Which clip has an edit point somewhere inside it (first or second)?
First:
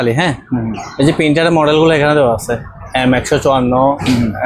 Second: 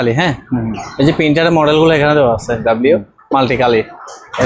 second